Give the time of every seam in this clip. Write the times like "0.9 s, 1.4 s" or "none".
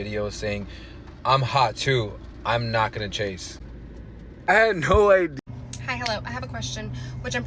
5.3 s